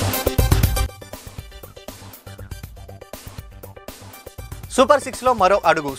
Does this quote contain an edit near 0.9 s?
yes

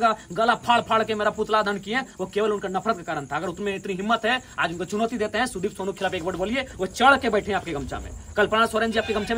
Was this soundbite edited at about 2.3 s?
no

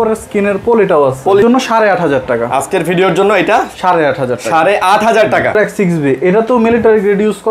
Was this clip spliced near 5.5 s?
yes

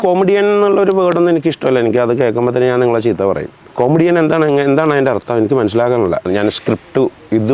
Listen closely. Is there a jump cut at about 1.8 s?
no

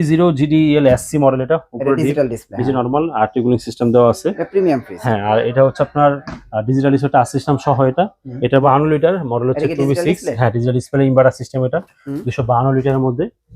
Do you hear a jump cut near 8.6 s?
yes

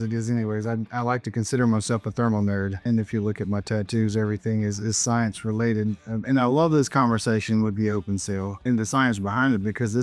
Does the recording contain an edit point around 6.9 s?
no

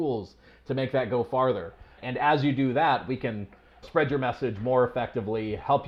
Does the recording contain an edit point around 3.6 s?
no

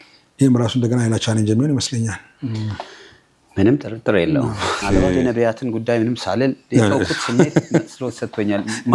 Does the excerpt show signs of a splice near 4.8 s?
yes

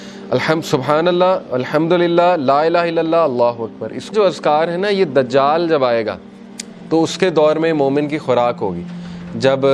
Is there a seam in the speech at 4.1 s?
yes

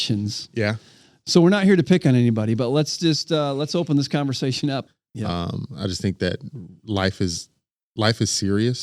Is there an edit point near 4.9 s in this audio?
yes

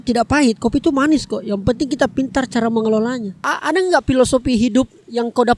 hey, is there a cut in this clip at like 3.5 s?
yes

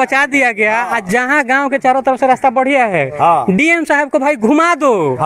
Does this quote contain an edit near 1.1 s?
no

